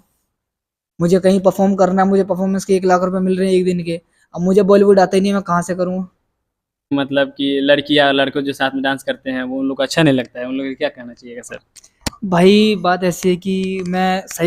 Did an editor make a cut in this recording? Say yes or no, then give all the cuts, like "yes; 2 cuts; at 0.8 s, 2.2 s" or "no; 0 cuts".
yes; 1 cut; at 6.9 s